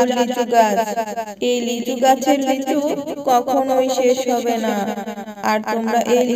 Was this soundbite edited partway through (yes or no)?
no